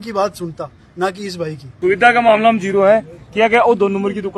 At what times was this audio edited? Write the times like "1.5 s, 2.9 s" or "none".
1.7 s